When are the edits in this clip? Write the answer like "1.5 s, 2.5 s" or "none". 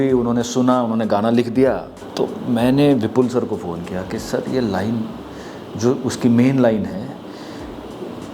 2.0 s